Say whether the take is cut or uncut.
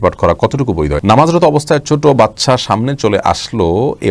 cut